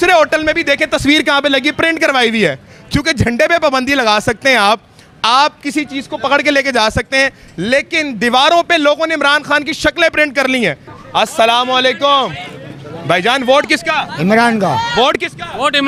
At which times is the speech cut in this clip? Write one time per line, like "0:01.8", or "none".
none

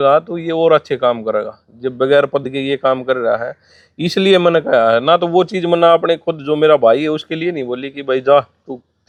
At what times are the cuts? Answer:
none

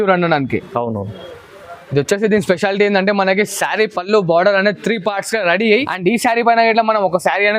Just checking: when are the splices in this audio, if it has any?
0:05.9

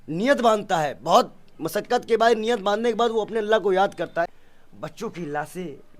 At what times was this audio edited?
0:04.3

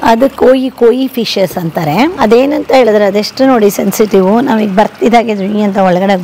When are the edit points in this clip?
0:02.1

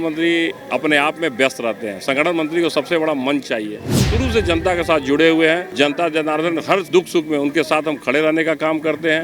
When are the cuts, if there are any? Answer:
0:04.0
0:05.7

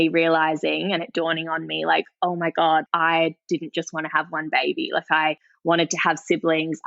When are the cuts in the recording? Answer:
0:02.9

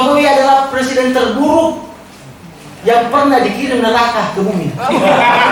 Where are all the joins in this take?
none

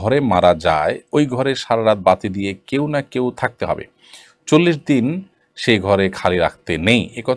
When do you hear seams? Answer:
none

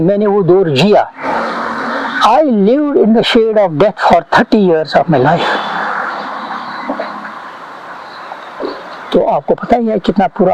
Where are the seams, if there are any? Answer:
none

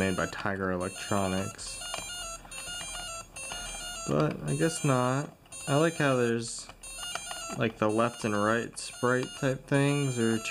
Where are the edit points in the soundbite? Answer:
none

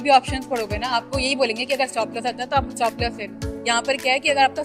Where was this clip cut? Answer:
none

